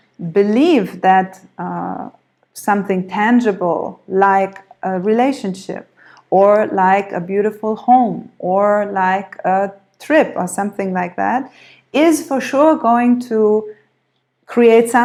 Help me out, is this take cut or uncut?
uncut